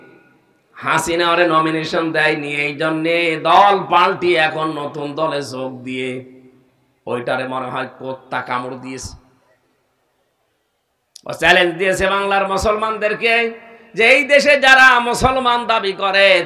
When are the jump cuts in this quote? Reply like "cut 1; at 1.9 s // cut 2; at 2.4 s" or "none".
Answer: none